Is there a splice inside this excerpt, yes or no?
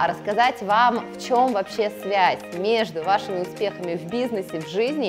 no